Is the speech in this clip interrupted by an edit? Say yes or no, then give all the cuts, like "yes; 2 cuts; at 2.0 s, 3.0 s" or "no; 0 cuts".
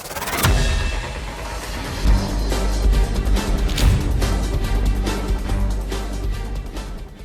no; 0 cuts